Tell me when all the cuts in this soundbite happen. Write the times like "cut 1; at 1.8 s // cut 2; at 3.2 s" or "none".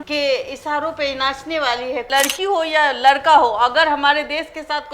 cut 1; at 2.1 s